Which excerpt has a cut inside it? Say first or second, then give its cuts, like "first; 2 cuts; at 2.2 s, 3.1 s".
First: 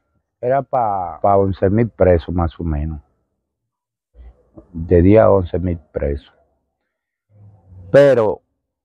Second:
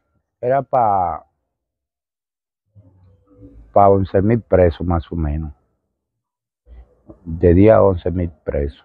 first; 1 cut; at 1.1 s